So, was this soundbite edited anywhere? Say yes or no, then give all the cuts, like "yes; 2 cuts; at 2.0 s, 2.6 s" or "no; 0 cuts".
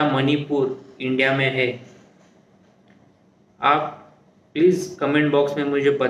no; 0 cuts